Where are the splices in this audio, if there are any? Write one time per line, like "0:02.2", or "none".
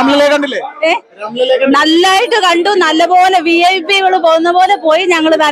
none